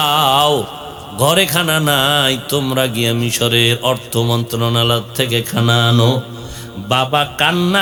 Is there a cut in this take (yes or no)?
no